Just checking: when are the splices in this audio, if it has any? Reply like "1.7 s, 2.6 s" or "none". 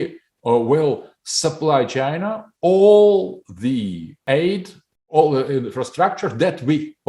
4.2 s